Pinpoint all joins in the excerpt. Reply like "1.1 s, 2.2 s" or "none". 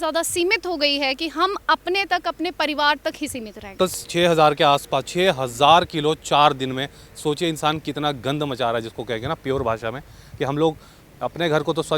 3.8 s